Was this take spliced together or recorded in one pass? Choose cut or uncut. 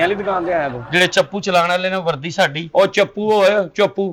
uncut